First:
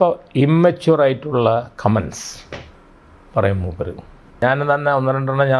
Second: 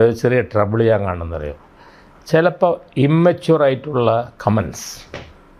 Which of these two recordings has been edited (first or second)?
first